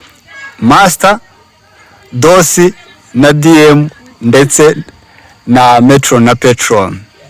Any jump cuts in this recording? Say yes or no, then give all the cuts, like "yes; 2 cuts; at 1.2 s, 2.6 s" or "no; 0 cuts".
no; 0 cuts